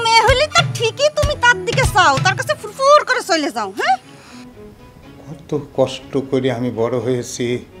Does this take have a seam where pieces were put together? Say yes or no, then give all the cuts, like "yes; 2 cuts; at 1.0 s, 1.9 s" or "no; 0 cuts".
yes; 1 cut; at 4.2 s